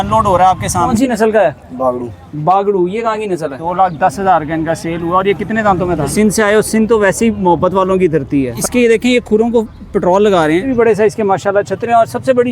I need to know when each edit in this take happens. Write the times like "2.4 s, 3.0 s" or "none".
0.9 s, 3.6 s, 6.1 s, 8.6 s, 10.7 s